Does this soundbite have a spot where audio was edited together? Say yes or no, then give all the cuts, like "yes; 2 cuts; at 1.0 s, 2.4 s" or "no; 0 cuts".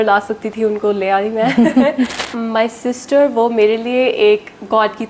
yes; 1 cut; at 2.3 s